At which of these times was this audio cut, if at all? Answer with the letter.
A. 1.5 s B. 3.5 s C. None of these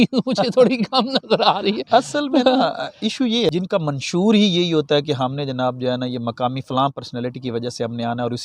B